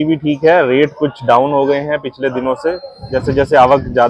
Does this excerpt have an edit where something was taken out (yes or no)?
yes